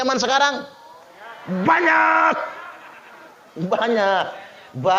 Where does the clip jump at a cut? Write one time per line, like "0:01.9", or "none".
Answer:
none